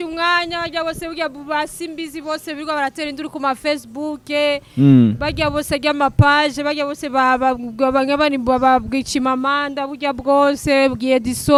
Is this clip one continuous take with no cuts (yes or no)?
yes